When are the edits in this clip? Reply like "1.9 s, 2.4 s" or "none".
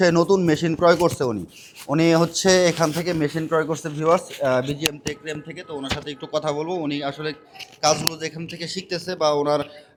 none